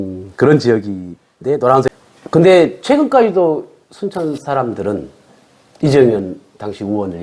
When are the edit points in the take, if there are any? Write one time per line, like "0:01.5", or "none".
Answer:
0:01.9